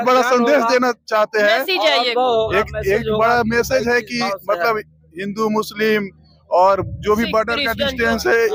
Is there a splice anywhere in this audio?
no; 0 cuts

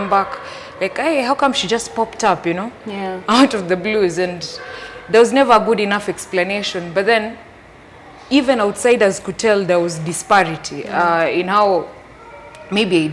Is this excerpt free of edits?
yes; 0 cuts

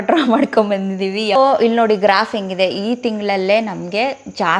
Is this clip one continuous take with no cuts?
no; 1 cut; at 1.4 s

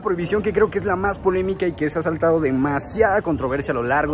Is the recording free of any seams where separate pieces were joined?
yes; 0 cuts

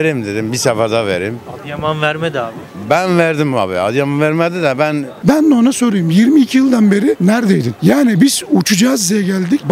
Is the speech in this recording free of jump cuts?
no; 1 cut; at 5.2 s

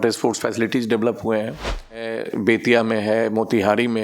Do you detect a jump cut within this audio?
yes; 1 cut; at 2.1 s

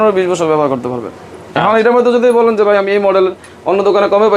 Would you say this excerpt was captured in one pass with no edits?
yes; 0 cuts

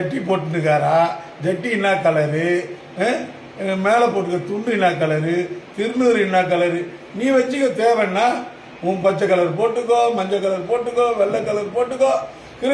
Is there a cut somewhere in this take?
no; 0 cuts

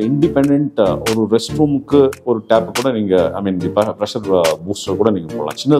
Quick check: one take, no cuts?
yes; 0 cuts

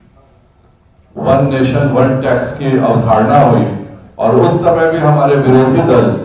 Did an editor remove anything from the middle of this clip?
no; 0 cuts

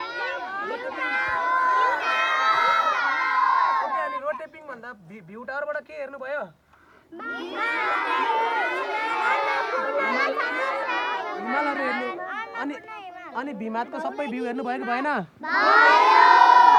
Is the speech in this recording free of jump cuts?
yes; 0 cuts

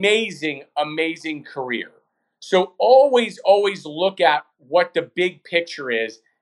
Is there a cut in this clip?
no; 0 cuts

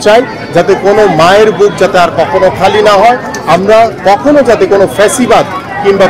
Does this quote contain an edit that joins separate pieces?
no; 0 cuts

